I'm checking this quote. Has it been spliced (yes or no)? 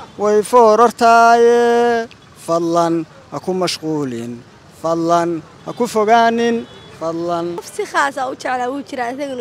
yes